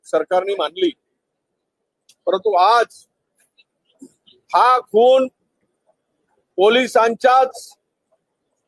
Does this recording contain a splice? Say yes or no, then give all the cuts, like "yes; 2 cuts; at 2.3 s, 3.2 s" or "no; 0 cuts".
no; 0 cuts